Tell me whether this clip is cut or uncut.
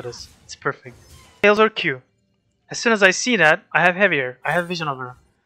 cut